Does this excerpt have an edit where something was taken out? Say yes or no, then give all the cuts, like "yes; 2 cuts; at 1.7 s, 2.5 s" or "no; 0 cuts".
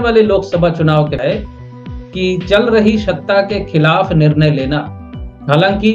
yes; 1 cut; at 1.2 s